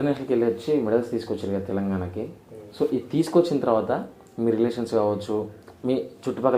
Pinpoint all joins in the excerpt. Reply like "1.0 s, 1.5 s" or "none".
none